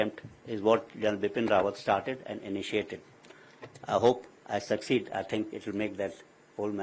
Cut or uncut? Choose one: uncut